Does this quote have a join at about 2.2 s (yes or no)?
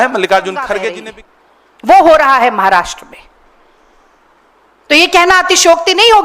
no